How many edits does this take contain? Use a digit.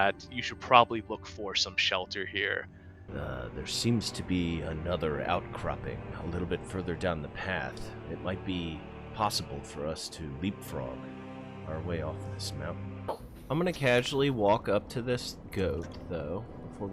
2